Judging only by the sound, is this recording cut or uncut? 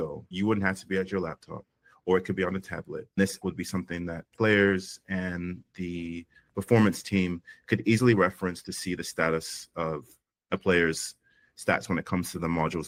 uncut